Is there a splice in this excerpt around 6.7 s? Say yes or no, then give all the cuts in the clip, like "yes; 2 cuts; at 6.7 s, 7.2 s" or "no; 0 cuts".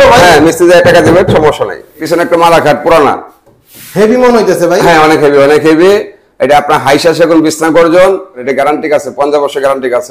no; 2 cuts; at 2.0 s, 8.5 s